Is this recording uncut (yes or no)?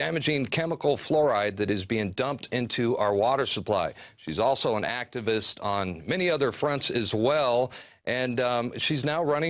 no